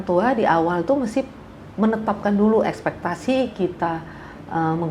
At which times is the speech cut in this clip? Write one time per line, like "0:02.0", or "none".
none